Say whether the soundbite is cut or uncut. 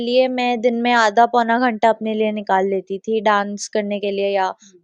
uncut